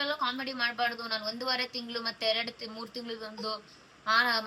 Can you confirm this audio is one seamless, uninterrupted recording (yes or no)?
yes